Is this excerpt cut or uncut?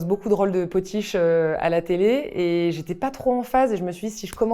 uncut